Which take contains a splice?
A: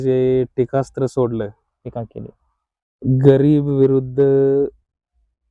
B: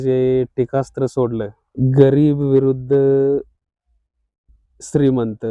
B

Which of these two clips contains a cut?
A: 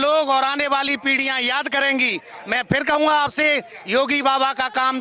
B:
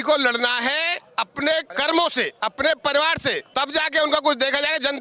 B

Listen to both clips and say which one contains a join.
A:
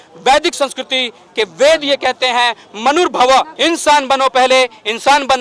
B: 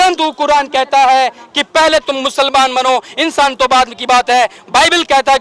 A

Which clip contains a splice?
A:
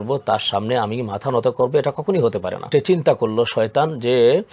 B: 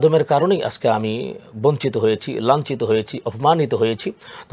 A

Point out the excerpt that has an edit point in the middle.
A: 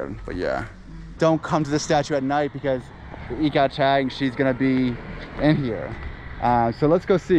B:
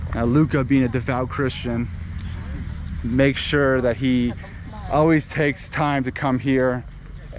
A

